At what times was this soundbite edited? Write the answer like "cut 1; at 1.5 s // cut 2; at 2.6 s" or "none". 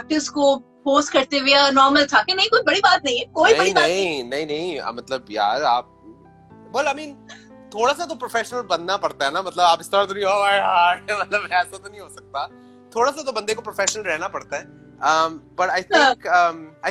none